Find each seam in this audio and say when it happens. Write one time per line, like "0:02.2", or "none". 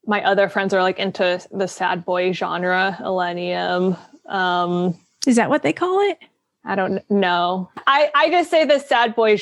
0:07.8